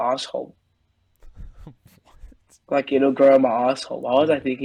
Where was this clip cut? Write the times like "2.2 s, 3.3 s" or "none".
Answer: none